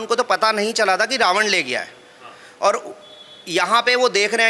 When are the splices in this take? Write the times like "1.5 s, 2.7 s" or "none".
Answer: none